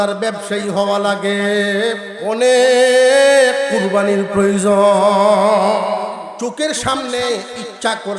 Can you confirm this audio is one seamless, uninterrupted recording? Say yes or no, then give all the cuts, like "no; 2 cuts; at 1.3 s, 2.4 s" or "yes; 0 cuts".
no; 2 cuts; at 2.1 s, 6.3 s